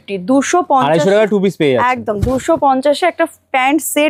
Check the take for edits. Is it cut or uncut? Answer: uncut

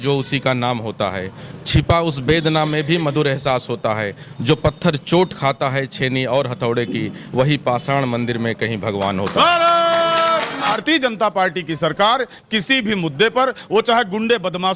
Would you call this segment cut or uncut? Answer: cut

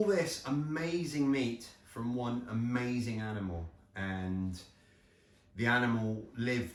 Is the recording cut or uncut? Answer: uncut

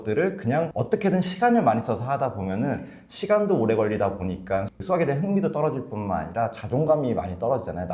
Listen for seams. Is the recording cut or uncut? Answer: uncut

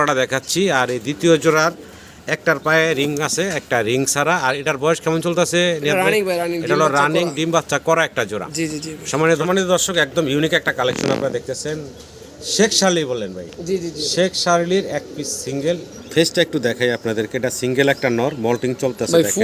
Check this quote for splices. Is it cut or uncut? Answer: cut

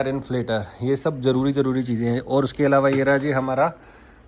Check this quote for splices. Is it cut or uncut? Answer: uncut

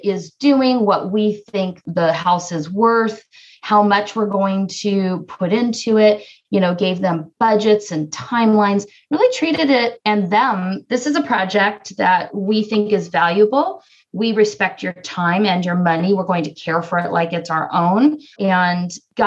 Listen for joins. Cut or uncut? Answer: cut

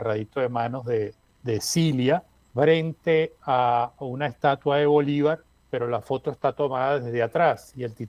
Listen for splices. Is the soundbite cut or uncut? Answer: cut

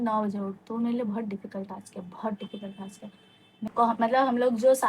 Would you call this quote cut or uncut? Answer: cut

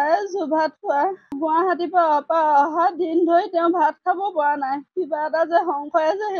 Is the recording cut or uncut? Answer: cut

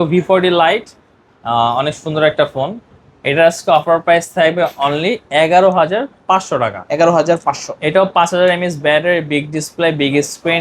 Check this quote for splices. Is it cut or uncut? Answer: uncut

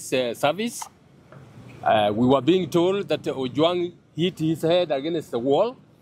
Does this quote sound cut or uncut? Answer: uncut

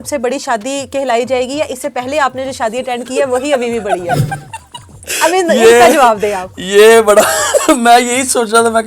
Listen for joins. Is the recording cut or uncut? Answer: uncut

